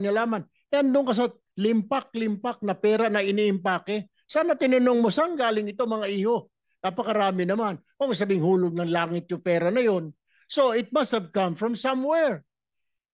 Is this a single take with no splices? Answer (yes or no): yes